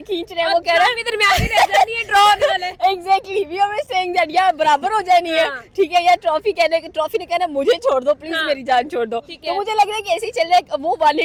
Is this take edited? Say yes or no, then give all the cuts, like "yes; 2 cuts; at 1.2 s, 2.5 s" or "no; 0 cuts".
no; 0 cuts